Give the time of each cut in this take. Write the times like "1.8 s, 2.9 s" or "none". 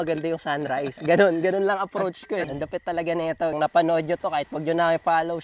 2.5 s, 3.5 s